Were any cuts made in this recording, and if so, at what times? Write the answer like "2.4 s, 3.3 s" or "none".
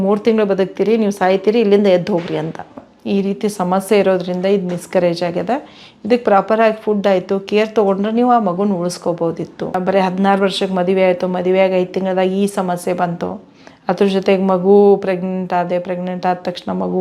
2.9 s, 9.8 s